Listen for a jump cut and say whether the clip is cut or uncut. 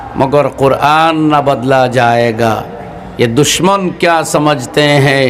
uncut